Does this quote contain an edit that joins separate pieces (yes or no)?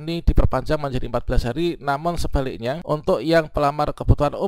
yes